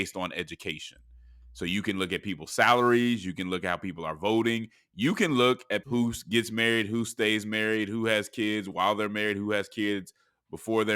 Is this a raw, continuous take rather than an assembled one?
no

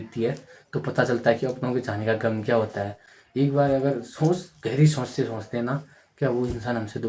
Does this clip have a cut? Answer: no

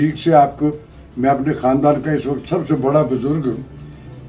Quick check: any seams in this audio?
no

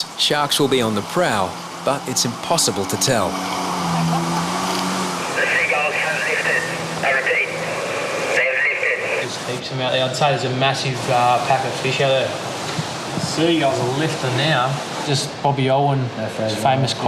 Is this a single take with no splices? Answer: yes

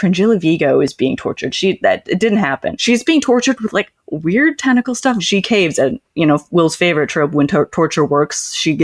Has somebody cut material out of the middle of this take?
yes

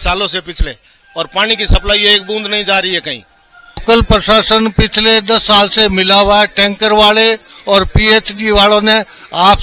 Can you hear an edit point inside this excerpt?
yes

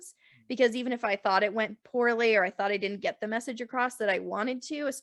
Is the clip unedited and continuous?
yes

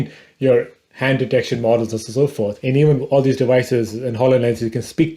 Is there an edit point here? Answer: yes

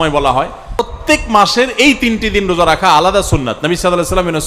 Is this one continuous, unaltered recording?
no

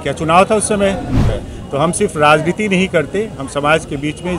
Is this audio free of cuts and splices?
no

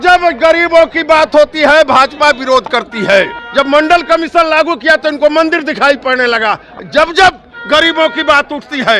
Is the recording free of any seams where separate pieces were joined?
no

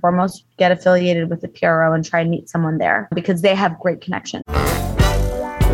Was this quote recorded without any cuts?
no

